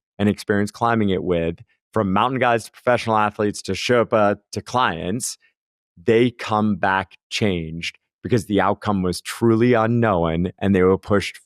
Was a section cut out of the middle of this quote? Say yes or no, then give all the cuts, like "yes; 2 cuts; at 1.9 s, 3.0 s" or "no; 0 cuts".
no; 0 cuts